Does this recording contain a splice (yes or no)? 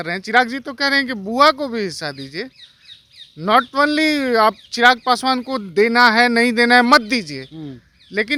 no